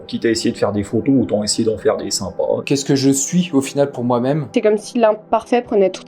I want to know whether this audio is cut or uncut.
cut